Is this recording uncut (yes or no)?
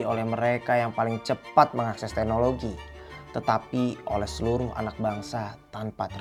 yes